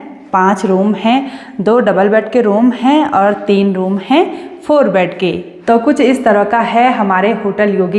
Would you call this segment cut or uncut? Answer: uncut